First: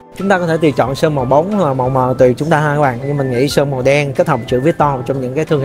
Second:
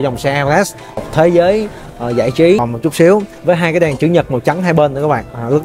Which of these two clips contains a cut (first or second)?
second